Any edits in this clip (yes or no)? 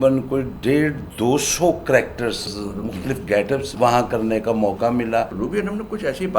yes